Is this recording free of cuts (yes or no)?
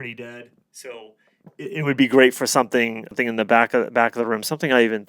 no